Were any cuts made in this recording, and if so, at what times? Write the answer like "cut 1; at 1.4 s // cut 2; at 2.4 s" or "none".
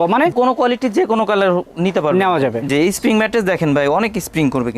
cut 1; at 2.7 s